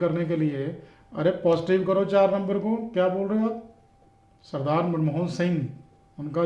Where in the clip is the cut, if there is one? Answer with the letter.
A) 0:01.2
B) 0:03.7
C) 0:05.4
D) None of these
D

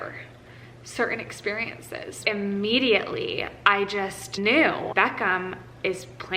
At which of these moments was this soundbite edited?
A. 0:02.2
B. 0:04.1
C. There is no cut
A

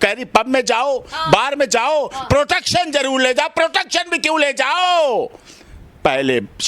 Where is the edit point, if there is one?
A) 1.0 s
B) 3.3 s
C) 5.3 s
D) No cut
D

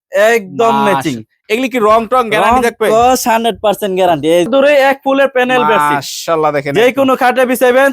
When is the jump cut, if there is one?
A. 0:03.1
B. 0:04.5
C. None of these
B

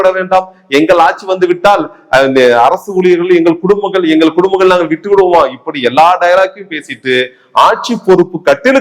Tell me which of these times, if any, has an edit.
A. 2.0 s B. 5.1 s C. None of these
C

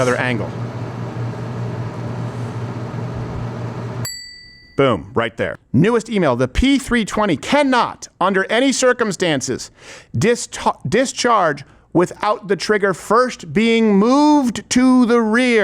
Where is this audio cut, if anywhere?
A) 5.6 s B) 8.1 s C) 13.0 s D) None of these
A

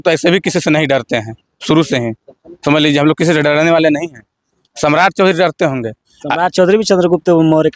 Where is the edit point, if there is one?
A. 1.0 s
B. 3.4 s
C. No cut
C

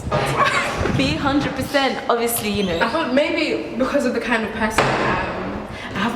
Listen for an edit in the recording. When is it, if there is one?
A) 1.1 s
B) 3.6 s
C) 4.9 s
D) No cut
B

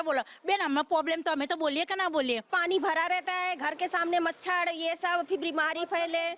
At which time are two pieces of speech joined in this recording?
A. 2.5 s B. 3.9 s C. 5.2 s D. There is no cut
A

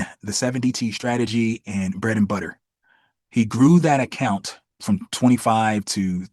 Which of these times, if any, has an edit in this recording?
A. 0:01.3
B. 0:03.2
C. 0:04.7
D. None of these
C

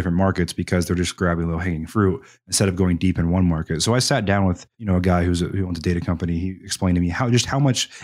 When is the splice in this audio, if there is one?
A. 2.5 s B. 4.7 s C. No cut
B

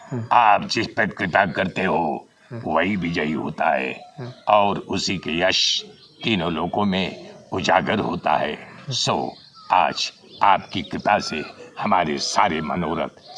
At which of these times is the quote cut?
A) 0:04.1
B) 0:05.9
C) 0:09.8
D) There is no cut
D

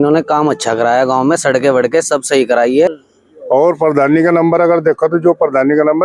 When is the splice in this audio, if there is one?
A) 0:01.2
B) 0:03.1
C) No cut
B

